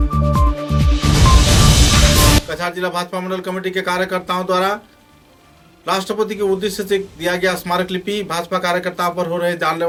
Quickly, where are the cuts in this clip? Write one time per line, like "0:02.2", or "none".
none